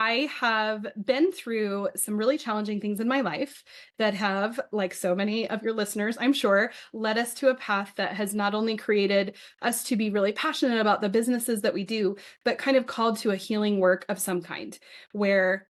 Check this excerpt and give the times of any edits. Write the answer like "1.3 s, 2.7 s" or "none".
none